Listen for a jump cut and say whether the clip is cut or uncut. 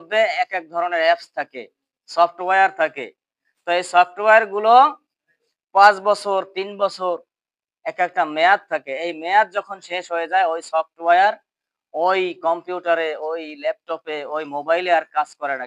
uncut